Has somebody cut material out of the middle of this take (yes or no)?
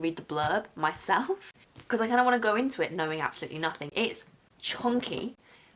no